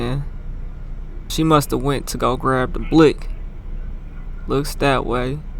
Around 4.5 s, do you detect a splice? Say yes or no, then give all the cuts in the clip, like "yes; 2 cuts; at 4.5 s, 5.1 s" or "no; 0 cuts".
no; 1 cut; at 1.3 s